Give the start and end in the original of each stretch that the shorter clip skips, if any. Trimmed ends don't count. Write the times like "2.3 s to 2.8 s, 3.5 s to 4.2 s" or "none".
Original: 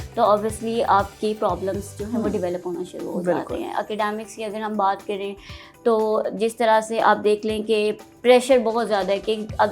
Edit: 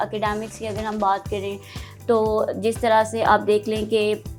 none